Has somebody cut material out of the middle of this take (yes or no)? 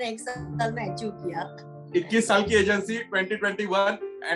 no